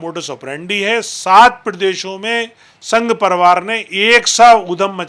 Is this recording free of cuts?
yes; 0 cuts

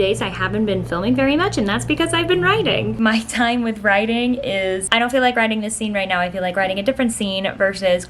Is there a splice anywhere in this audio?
yes; 2 cuts; at 3.0 s, 4.9 s

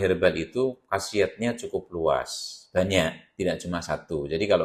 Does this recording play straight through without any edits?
yes; 0 cuts

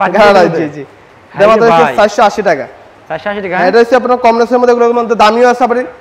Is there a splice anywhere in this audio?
no; 0 cuts

